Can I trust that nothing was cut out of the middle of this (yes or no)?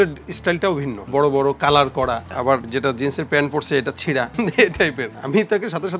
no